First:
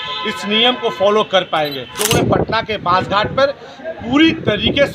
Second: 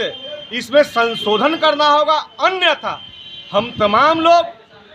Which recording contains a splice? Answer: first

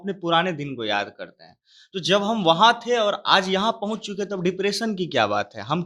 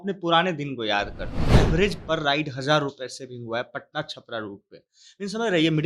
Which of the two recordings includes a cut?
second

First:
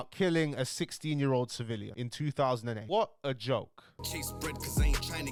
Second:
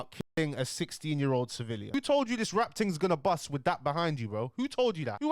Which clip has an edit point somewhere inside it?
second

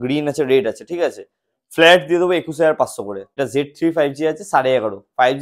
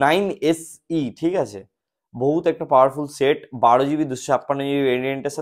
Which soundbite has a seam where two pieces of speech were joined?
first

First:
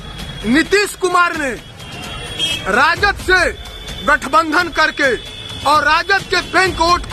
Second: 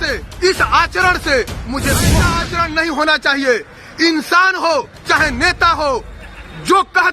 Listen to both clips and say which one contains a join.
second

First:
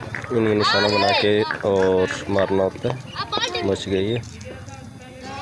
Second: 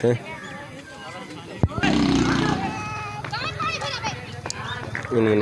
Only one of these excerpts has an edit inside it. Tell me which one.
second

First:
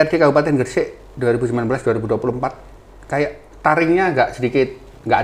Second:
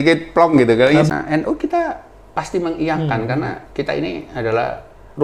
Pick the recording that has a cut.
second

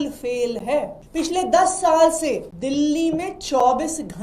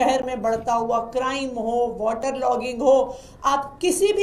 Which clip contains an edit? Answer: first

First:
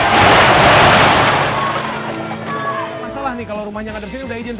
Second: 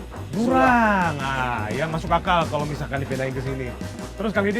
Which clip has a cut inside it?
first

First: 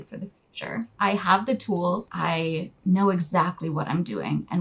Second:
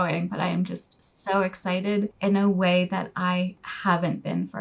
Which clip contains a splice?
first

